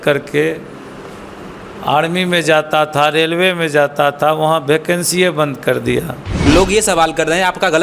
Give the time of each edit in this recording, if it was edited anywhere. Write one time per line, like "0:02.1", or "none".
0:06.2